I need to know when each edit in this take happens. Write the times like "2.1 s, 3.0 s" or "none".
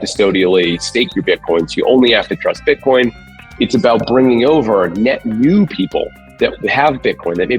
3.2 s

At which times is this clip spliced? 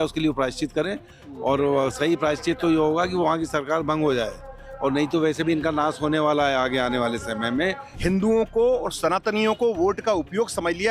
7.9 s

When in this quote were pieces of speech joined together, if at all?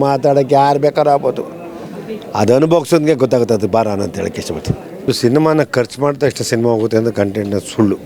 5.0 s

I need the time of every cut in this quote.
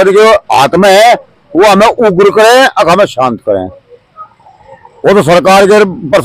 none

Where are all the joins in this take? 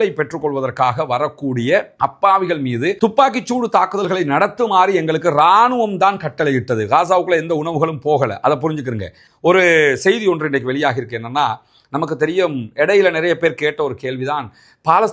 9.2 s

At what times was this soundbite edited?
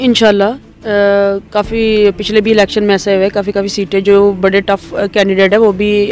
none

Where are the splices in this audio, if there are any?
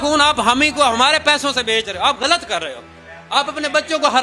none

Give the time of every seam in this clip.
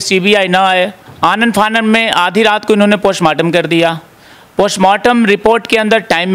1.0 s

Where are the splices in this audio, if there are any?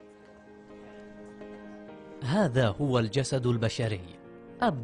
none

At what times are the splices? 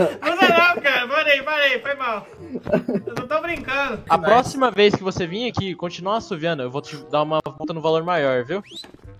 4.0 s

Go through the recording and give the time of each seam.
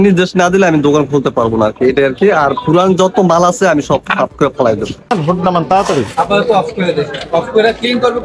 5.1 s

